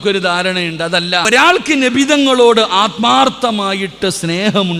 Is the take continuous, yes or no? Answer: no